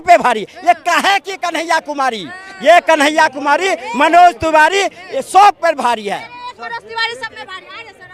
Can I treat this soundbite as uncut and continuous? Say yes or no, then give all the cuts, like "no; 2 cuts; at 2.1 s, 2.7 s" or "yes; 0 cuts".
yes; 0 cuts